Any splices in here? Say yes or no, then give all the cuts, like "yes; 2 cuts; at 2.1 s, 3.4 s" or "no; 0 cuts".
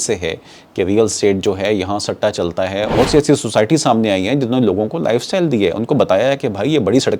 yes; 1 cut; at 2.9 s